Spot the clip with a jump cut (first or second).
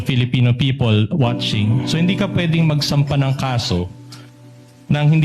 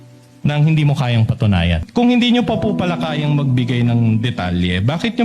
second